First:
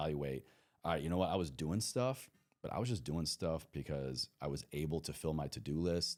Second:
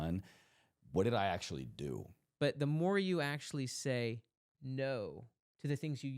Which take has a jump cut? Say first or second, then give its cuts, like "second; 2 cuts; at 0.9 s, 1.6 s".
second; 1 cut; at 2.2 s